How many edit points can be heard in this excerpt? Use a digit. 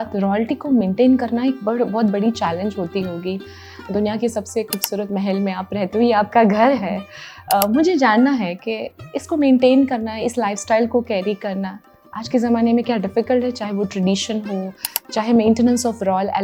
0